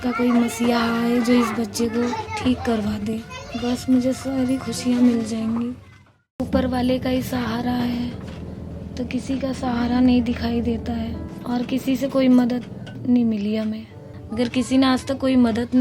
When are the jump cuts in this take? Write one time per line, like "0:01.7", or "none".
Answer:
0:02.2
0:06.1
0:11.2
0:14.1